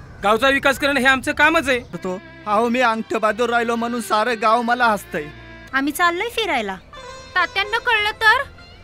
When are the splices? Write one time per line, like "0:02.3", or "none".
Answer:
0:02.0
0:05.5

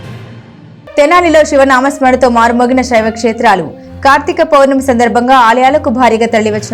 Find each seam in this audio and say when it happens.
0:01.0

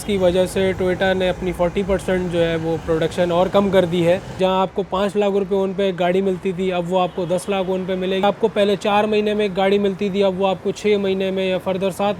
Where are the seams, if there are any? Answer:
0:04.4
0:08.2

